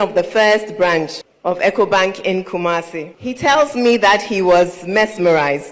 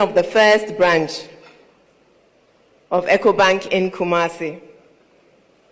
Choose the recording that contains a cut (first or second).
first